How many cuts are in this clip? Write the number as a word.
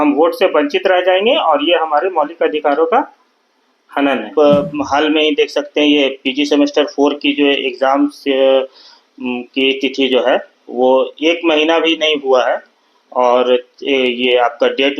one